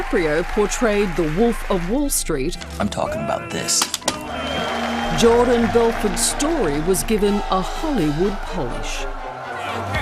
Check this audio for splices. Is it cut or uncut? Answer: cut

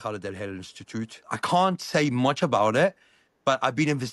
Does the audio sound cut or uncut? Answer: cut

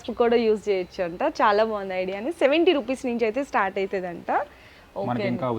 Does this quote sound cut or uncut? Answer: uncut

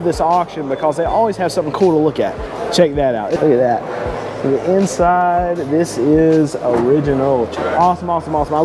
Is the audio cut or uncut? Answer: cut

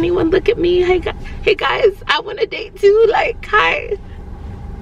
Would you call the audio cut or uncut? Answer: uncut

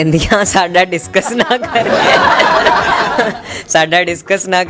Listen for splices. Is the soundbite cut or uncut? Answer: uncut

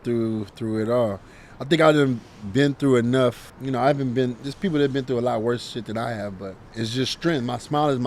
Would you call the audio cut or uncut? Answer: cut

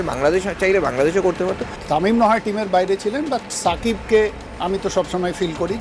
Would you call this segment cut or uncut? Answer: cut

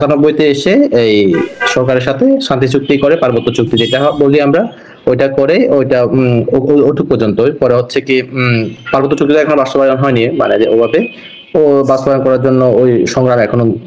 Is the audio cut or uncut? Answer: uncut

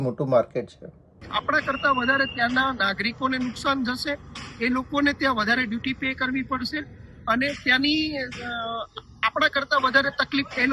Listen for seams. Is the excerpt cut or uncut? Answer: cut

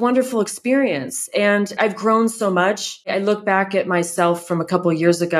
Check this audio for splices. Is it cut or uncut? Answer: cut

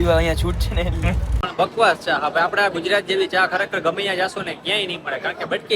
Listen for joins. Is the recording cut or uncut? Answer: cut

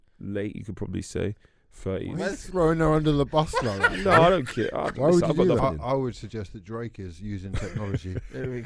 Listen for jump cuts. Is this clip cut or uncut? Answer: cut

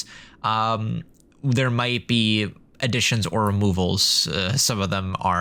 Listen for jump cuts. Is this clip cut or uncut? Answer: uncut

